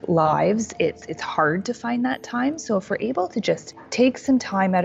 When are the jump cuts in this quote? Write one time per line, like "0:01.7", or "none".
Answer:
0:03.8